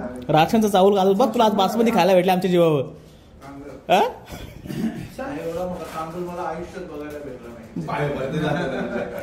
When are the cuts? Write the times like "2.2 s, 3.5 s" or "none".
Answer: none